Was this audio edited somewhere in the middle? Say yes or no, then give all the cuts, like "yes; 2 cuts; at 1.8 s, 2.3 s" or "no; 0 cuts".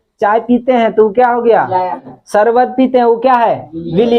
yes; 1 cut; at 2.2 s